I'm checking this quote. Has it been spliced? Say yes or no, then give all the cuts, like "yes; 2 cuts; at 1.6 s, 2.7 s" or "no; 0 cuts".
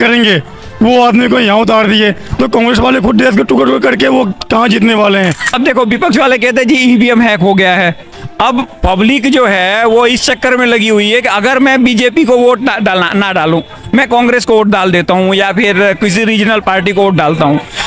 yes; 1 cut; at 5.5 s